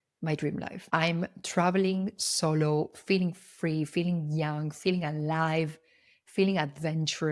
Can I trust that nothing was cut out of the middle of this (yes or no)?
yes